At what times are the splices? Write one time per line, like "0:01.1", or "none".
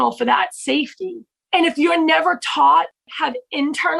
0:01.3
0:03.0